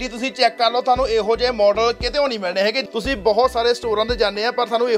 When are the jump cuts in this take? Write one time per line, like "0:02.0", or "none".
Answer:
0:02.8